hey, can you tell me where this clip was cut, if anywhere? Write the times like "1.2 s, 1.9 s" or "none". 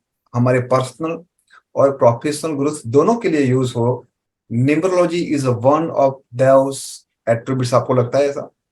none